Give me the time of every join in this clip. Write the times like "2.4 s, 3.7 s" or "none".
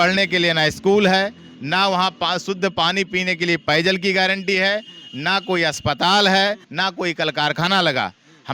6.7 s